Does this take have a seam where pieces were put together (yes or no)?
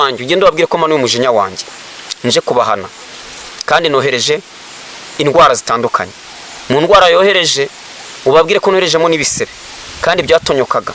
no